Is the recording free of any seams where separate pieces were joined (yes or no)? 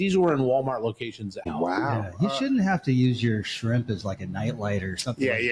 no